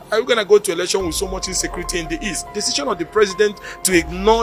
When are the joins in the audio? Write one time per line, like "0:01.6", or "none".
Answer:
0:02.4